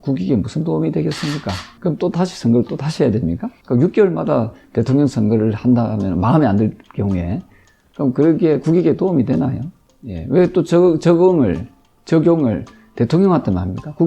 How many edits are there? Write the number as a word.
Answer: one